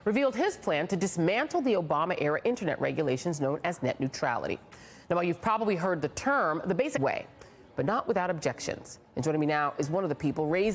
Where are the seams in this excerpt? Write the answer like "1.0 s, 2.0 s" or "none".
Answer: none